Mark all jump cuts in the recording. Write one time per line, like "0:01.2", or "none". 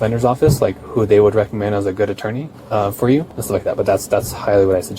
0:02.5
0:03.4